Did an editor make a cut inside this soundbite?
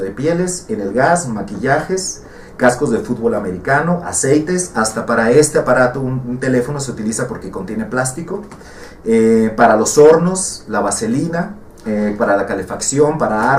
no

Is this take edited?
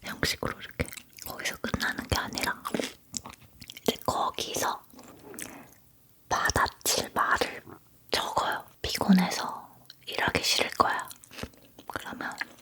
yes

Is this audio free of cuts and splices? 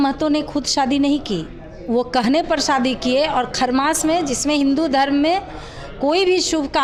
yes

